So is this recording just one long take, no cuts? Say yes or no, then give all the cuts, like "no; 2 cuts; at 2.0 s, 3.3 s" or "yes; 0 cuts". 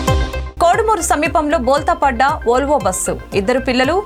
yes; 0 cuts